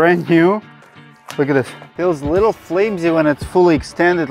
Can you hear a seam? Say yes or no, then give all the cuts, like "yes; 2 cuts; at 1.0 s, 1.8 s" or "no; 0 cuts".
yes; 1 cut; at 1.8 s